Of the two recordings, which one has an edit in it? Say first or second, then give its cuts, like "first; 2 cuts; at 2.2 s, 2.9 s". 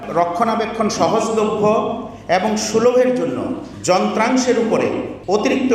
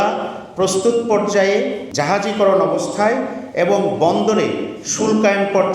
second; 1 cut; at 1.9 s